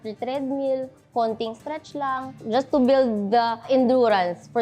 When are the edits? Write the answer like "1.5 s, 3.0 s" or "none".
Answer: 2.4 s, 3.7 s